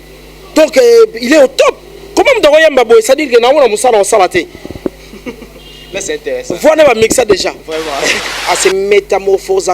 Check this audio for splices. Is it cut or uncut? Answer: cut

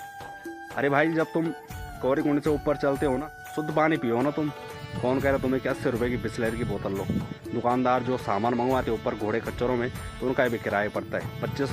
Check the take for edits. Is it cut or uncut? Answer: cut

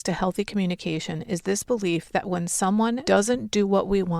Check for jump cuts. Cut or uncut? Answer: cut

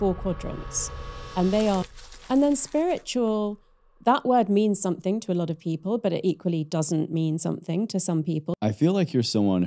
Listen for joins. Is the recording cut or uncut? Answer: cut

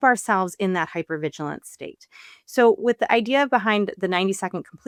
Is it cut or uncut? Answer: uncut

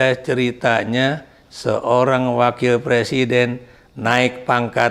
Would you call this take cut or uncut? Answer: uncut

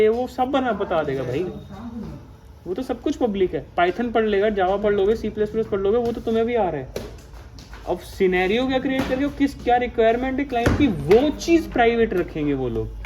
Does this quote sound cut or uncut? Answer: uncut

